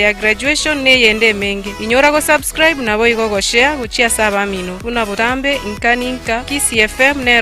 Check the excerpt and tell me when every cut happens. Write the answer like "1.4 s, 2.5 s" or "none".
none